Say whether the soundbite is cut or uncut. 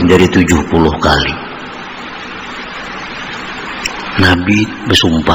uncut